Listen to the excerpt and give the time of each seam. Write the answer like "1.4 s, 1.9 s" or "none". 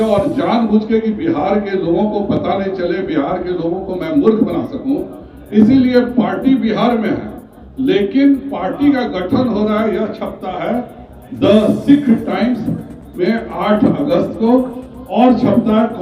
none